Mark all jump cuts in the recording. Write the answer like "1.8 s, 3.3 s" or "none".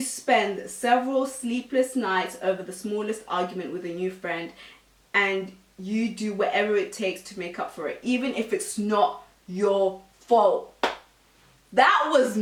none